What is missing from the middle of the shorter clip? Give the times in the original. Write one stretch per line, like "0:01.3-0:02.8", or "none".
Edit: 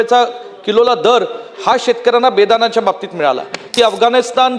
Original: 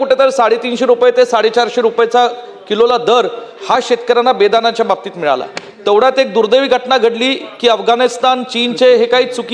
0:05.6-0:07.4